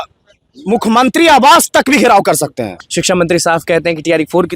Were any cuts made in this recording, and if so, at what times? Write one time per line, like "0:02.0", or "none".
0:02.8